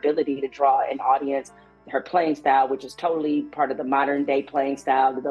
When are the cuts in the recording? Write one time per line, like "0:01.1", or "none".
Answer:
none